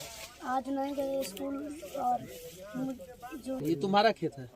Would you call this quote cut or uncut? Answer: cut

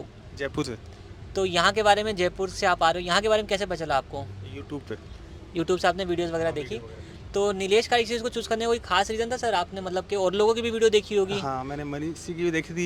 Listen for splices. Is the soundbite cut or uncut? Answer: uncut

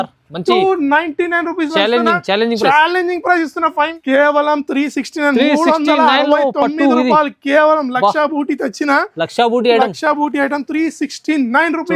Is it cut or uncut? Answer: cut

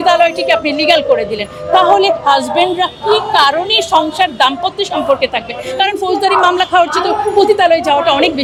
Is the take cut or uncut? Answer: uncut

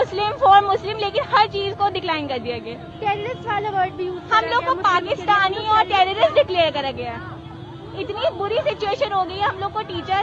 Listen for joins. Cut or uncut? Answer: uncut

